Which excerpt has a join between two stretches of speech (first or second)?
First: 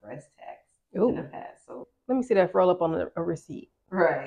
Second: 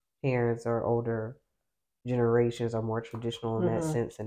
first